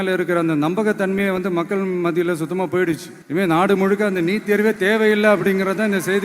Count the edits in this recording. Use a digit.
1